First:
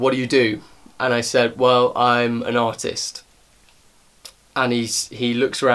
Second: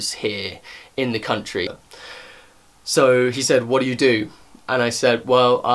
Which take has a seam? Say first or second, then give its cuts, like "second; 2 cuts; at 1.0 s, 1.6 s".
second; 1 cut; at 1.6 s